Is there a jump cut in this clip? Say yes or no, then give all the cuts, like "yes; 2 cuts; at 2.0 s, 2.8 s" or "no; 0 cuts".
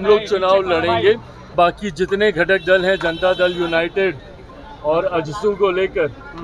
yes; 1 cut; at 1.5 s